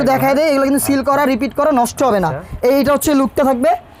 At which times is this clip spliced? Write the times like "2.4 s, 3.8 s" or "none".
none